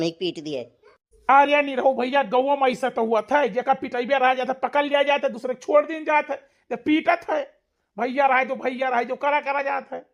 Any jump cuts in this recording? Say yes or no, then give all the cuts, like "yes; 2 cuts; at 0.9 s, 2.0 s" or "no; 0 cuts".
no; 0 cuts